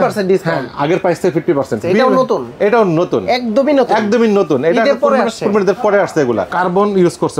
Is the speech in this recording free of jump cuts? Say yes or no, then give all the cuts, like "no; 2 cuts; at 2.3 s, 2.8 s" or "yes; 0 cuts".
no; 2 cuts; at 1.8 s, 6.5 s